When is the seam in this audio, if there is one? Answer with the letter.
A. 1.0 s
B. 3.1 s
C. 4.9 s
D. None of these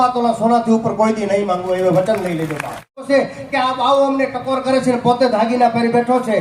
B